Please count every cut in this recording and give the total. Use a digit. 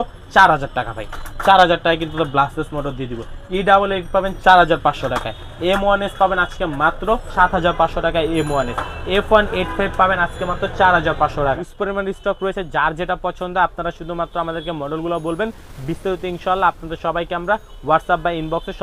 2